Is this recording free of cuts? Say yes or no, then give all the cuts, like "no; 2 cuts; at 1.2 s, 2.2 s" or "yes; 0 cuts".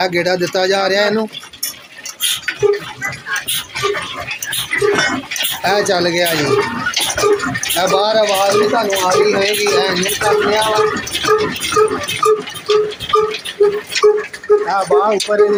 yes; 0 cuts